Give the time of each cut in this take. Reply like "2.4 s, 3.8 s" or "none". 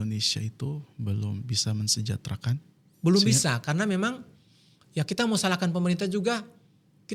none